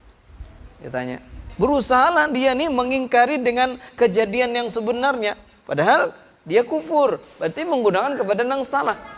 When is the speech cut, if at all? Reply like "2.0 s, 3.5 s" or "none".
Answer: 1.5 s